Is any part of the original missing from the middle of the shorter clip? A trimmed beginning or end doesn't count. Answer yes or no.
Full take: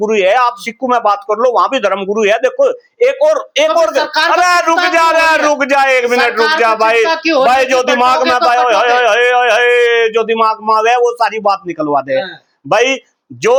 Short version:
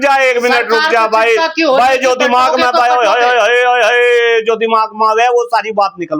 no